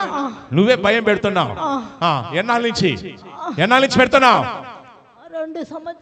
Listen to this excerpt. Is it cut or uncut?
uncut